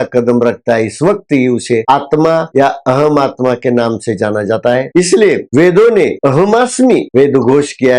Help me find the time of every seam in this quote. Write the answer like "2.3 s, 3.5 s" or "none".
2.5 s, 7.1 s

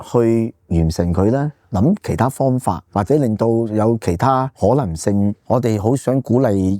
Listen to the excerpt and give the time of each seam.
2.8 s, 4.5 s, 5.4 s

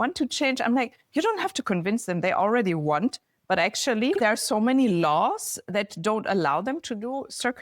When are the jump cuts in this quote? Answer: 4.2 s, 5.7 s

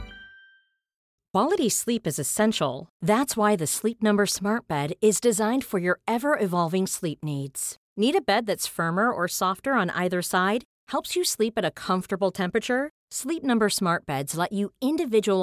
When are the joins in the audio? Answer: 1.0 s

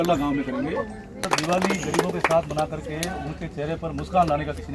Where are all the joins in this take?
1.3 s

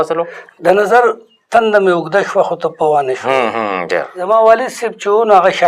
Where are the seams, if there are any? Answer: 4.1 s

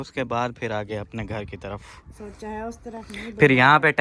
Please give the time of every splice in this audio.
2.2 s

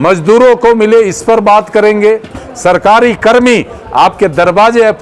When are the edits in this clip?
2.4 s

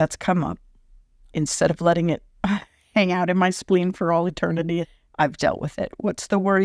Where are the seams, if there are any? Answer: 1.3 s, 4.8 s

